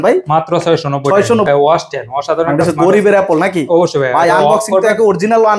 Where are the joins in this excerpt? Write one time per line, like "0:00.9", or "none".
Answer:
0:01.5